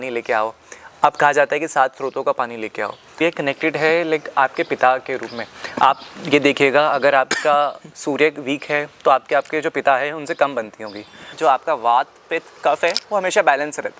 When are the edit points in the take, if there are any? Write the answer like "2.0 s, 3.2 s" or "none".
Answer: 3.2 s, 11.3 s